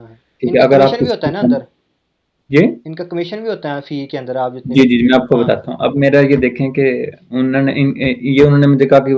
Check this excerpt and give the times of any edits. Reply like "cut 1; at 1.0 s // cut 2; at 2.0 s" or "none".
none